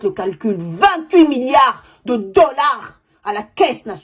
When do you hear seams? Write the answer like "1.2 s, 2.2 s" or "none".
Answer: none